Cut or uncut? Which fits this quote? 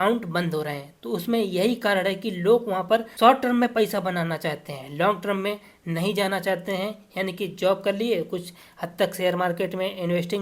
uncut